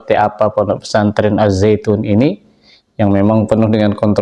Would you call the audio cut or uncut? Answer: uncut